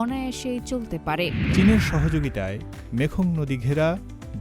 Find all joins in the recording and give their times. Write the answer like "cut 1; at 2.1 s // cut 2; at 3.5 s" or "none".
cut 1; at 1.4 s